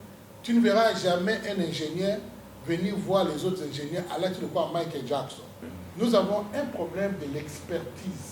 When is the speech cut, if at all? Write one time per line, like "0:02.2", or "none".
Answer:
0:05.7